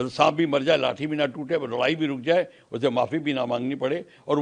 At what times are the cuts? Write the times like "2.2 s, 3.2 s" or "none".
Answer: none